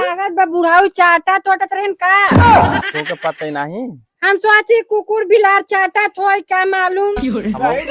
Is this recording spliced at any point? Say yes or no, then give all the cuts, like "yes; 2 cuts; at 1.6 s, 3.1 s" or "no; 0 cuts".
yes; 2 cuts; at 2.3 s, 3.2 s